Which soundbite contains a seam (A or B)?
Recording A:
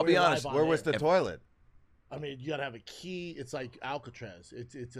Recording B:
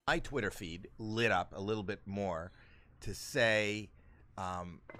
A